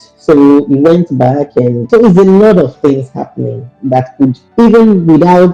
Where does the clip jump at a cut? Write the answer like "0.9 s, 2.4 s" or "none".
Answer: 1.9 s, 4.4 s